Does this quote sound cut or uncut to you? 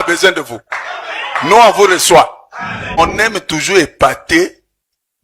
cut